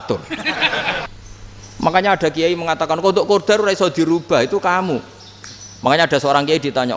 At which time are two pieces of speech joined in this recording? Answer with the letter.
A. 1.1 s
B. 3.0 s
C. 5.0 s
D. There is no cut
A